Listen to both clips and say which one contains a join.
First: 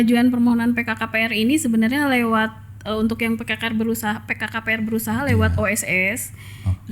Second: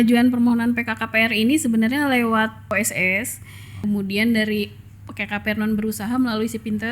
second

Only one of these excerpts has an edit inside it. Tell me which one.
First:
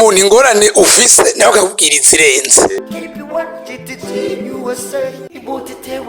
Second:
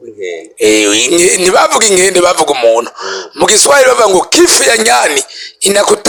first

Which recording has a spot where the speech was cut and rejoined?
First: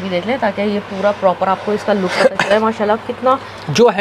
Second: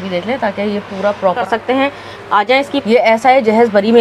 second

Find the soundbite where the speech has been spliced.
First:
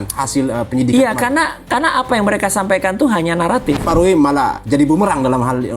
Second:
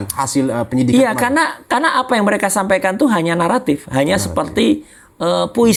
first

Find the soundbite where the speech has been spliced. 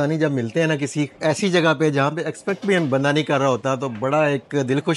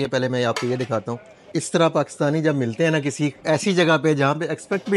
second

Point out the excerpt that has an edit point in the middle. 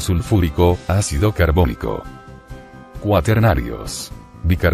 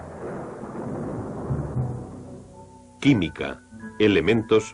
first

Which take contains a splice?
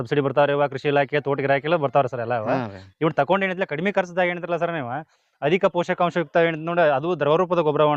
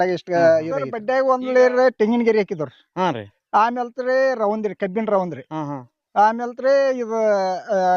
second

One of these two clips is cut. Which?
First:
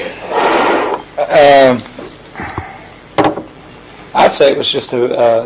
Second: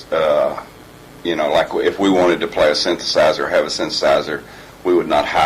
second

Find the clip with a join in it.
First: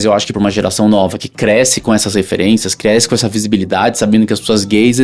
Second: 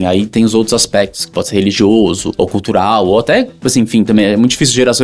second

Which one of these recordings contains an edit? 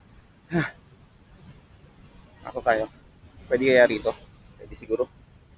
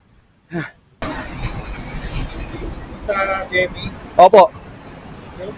second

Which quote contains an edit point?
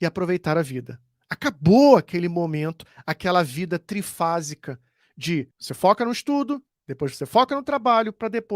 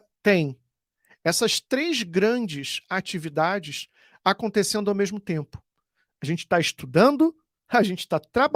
first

